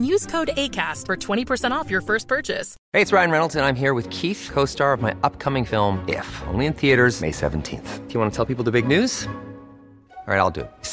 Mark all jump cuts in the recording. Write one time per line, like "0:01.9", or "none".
0:02.7